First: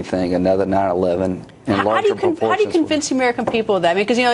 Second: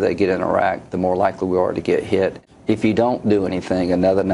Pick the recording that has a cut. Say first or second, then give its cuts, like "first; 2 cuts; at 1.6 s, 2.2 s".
second; 1 cut; at 2.4 s